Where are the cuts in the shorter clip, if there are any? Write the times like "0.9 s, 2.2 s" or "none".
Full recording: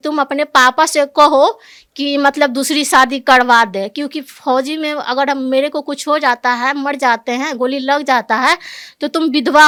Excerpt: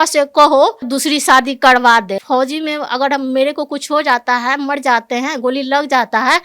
0.9 s, 2.2 s